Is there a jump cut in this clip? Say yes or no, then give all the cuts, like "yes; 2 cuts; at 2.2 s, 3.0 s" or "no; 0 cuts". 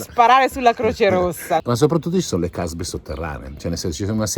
yes; 1 cut; at 1.6 s